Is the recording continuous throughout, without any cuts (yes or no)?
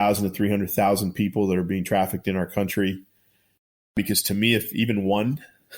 no